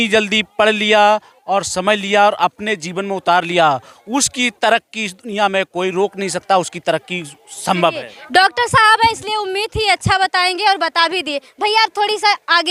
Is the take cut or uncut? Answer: uncut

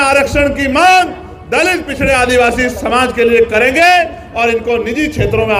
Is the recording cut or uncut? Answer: uncut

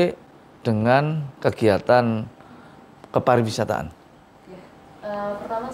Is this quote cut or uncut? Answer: cut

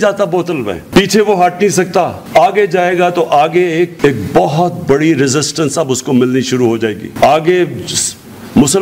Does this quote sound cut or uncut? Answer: uncut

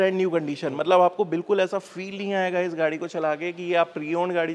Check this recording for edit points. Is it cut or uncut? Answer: uncut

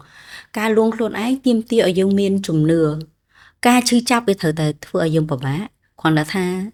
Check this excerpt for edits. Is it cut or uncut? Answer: uncut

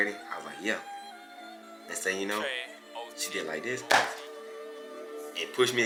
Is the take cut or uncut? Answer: uncut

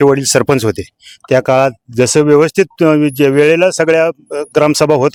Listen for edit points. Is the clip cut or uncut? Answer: uncut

